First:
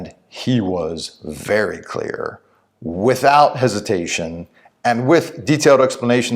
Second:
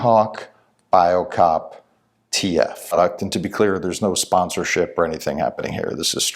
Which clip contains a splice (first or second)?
second